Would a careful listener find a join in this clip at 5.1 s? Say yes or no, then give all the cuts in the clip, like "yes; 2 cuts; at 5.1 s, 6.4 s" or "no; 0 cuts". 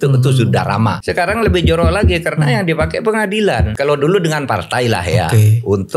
no; 2 cuts; at 1.0 s, 3.7 s